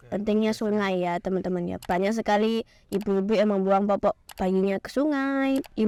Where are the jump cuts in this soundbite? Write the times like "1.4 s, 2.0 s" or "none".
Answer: none